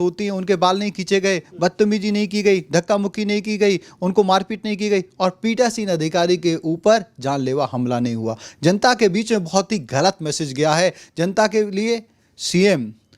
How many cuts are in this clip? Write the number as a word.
zero